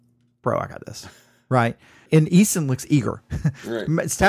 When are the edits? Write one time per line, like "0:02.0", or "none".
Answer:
0:02.0